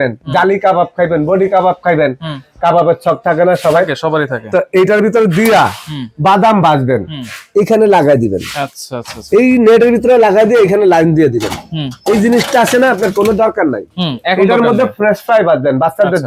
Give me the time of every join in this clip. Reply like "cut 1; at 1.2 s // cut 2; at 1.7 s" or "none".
none